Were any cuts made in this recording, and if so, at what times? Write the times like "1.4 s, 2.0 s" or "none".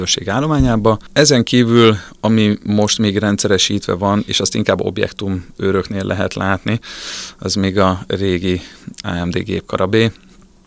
1.1 s